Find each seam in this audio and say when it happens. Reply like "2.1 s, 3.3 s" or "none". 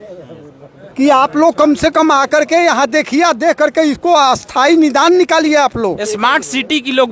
6.1 s